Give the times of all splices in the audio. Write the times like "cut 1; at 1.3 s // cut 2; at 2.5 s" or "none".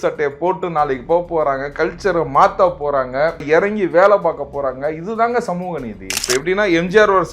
cut 1; at 3.4 s // cut 2; at 6.1 s